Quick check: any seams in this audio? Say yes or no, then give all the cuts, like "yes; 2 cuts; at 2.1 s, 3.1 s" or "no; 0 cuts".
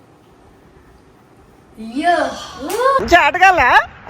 no; 0 cuts